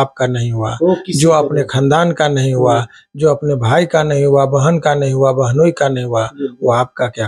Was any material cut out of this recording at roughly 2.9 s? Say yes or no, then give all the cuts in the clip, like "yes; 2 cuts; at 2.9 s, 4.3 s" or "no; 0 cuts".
no; 0 cuts